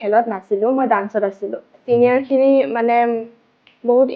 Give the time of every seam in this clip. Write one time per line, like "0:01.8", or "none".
0:01.7